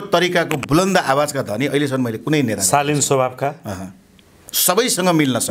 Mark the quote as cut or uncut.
uncut